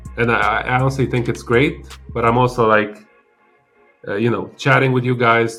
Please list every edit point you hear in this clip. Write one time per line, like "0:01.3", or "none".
none